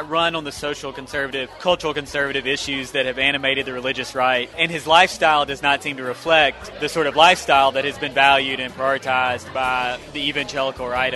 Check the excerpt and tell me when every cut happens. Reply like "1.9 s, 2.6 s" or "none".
1.5 s, 4.5 s, 6.7 s